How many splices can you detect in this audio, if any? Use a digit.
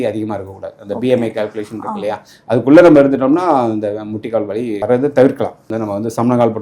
2